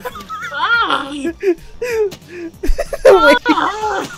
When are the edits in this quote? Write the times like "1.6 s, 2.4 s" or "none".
none